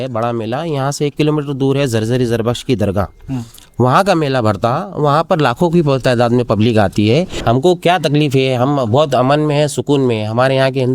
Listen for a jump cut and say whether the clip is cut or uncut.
cut